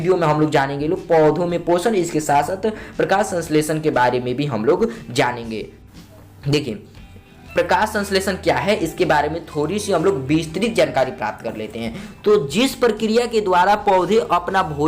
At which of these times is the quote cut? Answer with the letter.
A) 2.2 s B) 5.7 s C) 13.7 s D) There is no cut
B